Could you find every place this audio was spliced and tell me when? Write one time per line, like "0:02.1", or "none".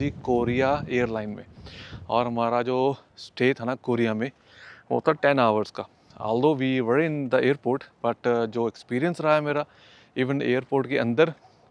none